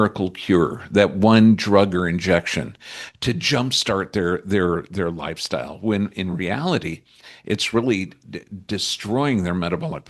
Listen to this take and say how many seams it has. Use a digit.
0